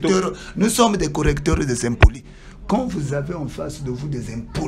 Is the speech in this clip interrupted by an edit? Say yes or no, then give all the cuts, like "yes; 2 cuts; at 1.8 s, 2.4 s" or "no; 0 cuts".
no; 0 cuts